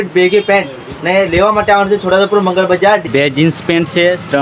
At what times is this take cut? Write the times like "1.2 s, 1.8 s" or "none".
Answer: 3.1 s